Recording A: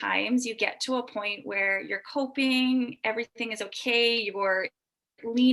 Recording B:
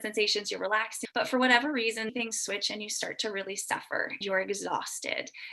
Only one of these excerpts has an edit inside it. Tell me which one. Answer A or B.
B